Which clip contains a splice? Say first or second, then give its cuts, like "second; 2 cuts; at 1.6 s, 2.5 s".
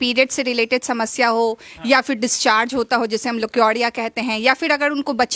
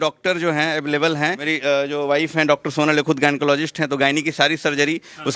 second; 1 cut; at 1.5 s